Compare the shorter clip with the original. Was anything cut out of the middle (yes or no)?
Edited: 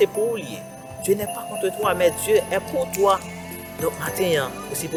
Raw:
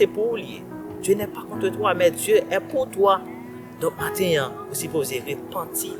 no